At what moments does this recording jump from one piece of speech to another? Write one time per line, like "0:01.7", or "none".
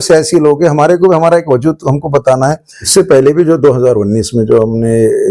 0:02.9